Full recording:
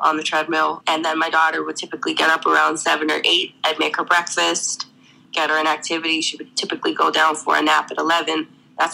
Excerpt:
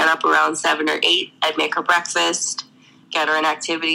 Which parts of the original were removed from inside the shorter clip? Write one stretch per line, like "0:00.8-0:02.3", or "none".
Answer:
none

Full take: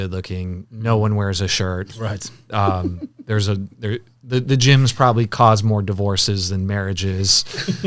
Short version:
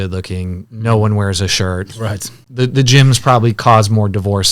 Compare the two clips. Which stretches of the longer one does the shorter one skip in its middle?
0:02.4-0:04.1

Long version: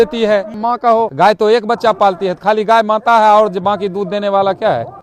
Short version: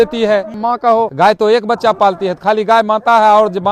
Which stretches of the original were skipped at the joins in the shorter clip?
none

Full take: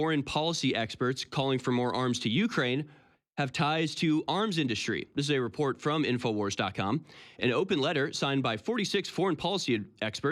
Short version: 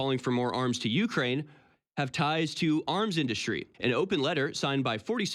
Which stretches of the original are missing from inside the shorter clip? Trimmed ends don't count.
0:05.1-0:07.2

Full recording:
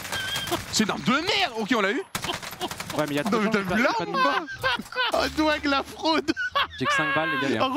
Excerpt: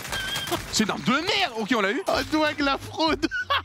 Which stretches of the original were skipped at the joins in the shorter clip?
0:02.0-0:05.1

